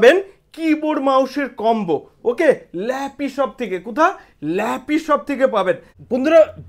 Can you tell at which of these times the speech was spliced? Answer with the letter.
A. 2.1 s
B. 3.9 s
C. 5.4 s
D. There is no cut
D